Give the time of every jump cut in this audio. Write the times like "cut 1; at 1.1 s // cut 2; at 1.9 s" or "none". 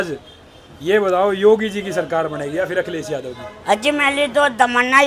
none